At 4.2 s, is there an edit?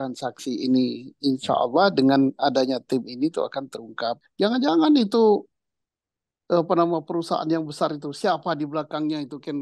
yes; 1 cut; at 4.2 s

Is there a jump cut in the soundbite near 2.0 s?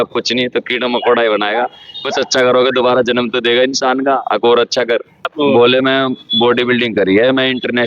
no; 1 cut; at 5.3 s

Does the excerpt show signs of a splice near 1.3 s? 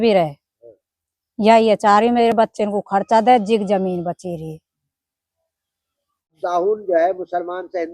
no; 1 cut; at 6.4 s

